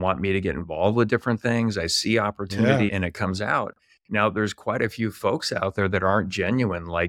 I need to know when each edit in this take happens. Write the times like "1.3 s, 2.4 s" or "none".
2.9 s

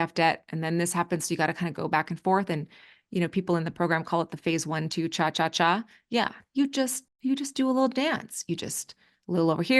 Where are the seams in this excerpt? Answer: none

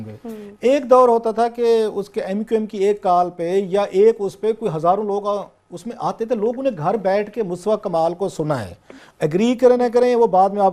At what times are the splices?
5.6 s

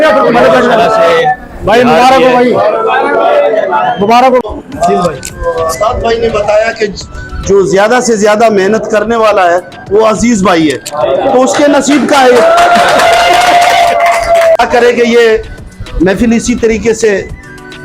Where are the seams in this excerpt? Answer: 4.4 s, 14.6 s

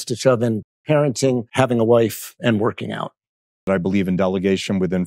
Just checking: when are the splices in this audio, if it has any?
1.5 s, 2.3 s, 3.6 s

